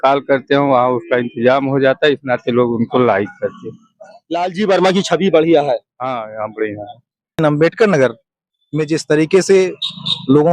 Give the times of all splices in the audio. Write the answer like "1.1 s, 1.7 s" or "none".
7.4 s